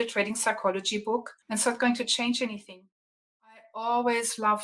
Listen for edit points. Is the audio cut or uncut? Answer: cut